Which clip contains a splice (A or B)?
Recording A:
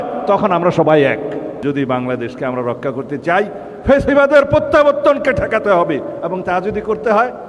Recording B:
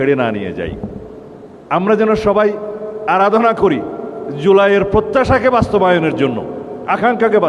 A